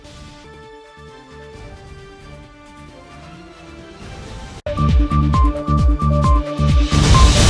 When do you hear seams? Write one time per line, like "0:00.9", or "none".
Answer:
none